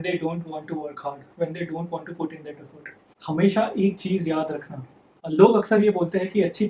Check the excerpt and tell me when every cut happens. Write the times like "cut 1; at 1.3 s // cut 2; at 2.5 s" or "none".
cut 1; at 3.1 s

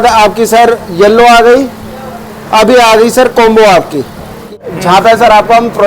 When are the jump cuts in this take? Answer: cut 1; at 4.6 s

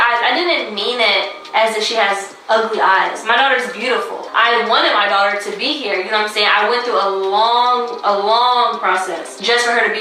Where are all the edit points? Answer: none

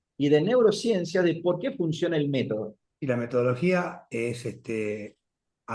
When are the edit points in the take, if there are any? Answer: cut 1; at 2.8 s

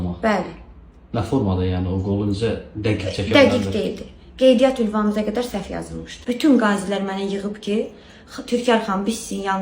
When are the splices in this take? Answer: cut 1; at 6.2 s

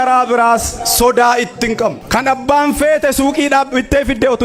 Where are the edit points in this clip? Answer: cut 1; at 2.0 s

